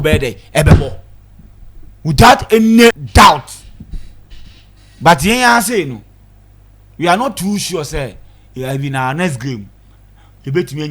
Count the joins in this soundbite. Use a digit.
1